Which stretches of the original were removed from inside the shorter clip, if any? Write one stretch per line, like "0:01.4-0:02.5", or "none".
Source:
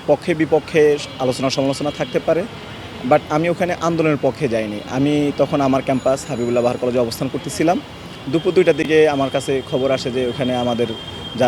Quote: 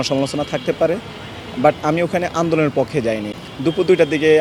0:04.8-0:08.0